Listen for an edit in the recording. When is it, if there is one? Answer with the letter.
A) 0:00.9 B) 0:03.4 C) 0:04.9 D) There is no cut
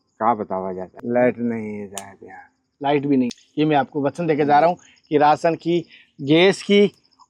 B